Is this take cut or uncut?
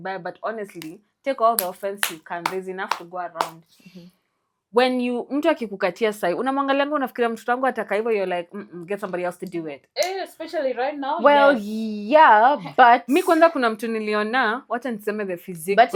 uncut